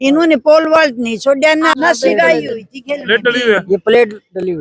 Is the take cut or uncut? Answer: cut